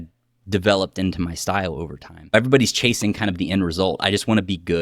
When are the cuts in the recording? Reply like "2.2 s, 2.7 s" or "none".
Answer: 2.3 s